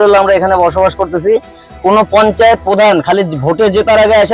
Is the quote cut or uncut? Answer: uncut